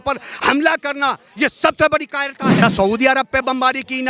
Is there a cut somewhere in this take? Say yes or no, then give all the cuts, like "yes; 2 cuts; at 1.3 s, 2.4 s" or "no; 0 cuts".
yes; 1 cut; at 2.6 s